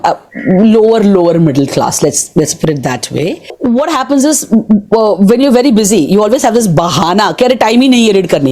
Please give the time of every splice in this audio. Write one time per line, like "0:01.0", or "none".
0:03.5